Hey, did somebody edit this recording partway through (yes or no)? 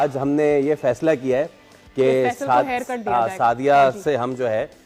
no